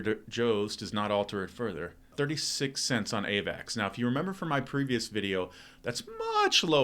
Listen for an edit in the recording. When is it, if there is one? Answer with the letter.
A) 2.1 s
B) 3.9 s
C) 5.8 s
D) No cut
A